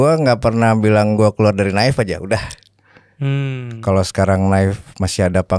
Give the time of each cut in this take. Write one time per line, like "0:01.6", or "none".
none